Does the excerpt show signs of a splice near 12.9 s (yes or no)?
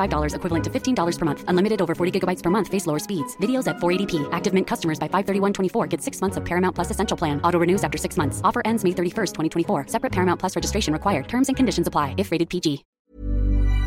yes